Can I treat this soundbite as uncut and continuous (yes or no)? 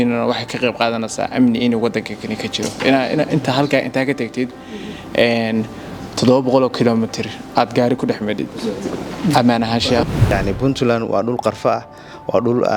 no